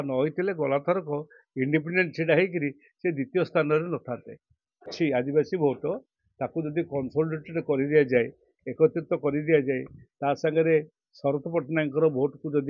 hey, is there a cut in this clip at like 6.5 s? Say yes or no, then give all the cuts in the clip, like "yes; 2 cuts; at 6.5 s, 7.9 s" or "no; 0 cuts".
no; 1 cut; at 4.9 s